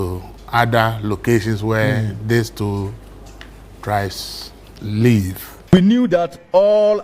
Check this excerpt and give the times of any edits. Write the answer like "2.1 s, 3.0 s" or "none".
5.6 s